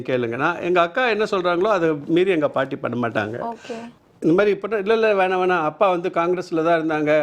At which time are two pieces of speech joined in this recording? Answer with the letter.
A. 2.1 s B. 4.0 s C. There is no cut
B